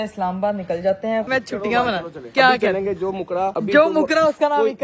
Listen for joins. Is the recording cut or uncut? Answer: cut